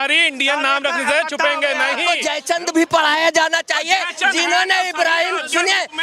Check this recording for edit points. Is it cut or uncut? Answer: cut